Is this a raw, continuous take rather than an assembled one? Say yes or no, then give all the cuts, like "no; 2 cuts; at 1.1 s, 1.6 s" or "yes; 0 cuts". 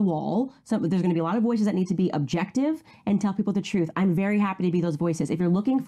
yes; 0 cuts